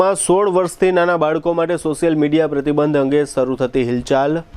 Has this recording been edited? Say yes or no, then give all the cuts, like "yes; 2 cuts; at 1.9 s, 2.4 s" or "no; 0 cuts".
no; 0 cuts